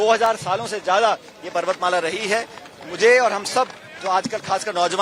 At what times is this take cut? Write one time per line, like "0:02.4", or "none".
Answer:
none